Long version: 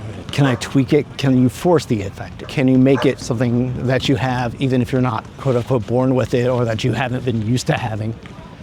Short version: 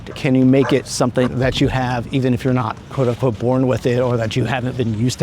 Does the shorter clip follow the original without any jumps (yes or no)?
no